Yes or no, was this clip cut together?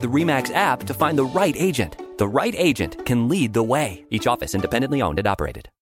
yes